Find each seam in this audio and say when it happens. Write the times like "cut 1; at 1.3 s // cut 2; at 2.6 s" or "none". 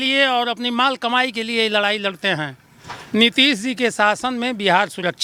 none